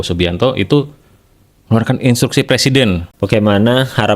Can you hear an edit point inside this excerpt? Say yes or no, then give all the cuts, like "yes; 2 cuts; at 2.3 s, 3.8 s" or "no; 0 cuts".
yes; 1 cut; at 3.1 s